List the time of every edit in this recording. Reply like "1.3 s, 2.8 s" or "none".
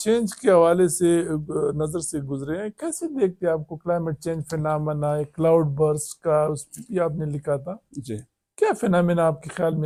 none